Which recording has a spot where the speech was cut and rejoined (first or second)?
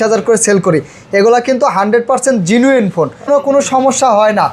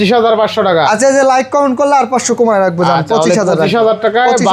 first